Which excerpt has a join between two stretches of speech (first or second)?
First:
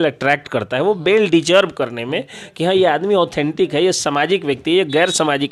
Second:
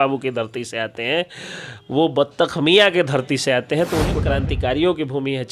second